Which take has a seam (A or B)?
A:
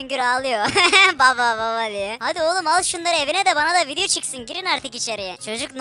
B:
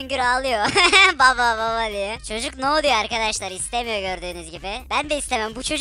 B